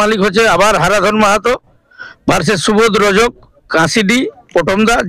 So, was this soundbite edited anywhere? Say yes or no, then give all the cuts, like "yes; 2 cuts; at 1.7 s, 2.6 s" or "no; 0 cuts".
no; 0 cuts